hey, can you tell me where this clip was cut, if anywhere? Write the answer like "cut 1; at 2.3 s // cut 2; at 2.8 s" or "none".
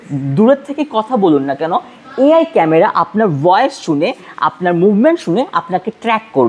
none